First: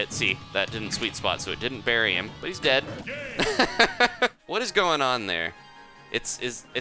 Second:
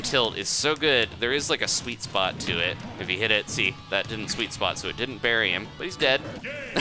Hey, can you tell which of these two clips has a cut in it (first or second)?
first